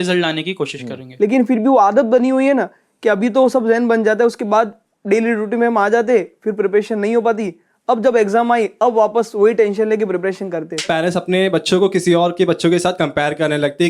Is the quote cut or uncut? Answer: cut